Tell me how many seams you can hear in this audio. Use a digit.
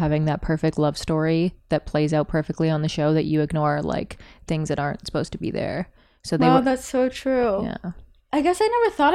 0